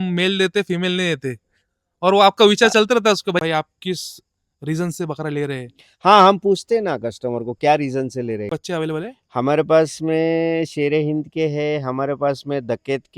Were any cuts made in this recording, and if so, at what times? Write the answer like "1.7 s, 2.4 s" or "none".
3.4 s, 8.5 s